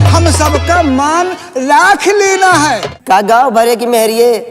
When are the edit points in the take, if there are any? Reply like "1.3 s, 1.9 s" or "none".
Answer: 2.9 s